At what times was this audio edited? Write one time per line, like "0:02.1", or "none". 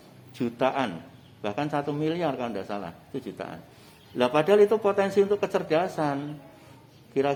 none

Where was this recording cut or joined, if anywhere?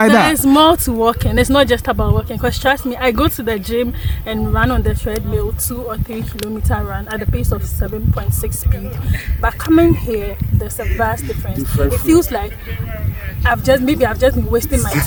none

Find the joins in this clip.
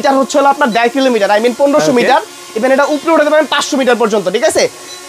none

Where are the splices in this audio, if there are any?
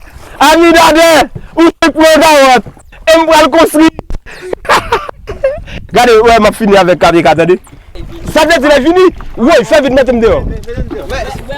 0:07.9

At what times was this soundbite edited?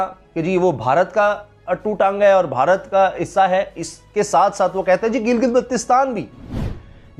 none

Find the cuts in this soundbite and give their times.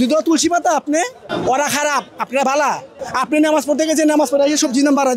0:01.3
0:03.0

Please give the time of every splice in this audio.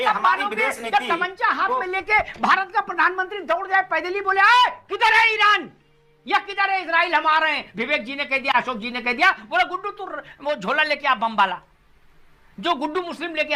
none

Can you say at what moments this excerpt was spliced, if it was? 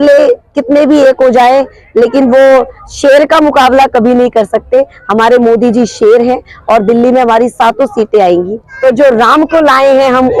0:08.6

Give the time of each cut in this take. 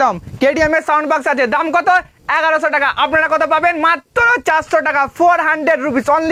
none

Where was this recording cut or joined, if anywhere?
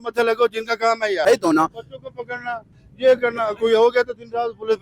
0:01.2

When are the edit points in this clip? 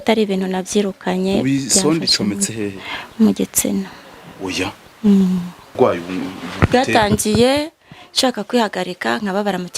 0:05.7

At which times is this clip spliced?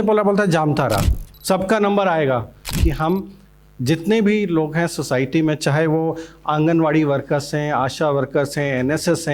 0:02.7

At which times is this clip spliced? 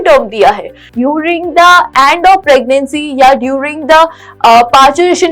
0:00.9

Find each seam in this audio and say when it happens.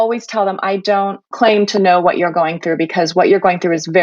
0:01.3

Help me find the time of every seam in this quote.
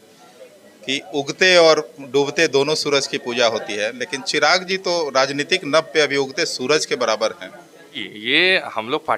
0:08.1

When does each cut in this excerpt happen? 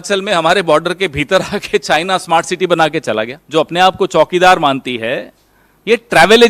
0:03.4

